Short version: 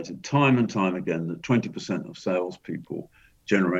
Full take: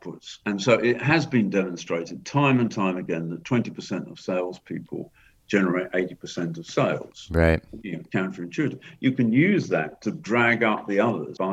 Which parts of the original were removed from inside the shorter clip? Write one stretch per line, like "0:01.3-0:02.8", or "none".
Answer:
none